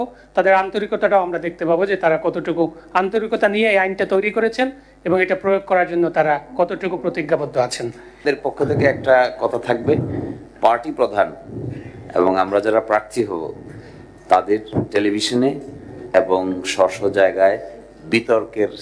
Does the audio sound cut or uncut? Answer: cut